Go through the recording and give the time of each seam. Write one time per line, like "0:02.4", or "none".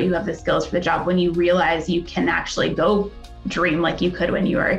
none

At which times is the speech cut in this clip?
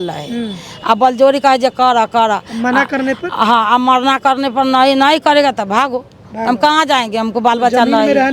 none

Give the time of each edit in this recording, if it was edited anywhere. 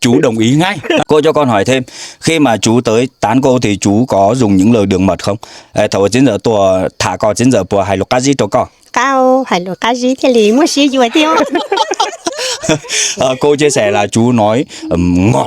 0:01.0

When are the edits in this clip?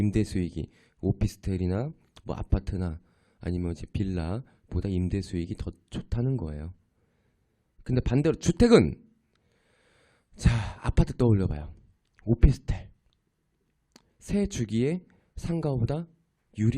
0:01.2

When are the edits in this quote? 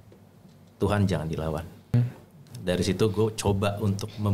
0:01.9

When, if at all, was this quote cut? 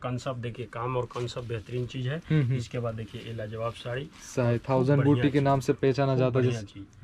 none

